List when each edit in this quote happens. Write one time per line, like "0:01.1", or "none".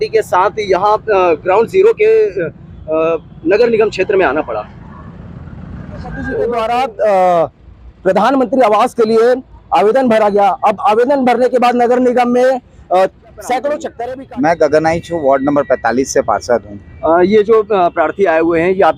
0:06.5
0:13.9